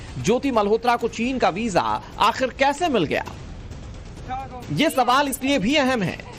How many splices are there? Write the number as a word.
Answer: zero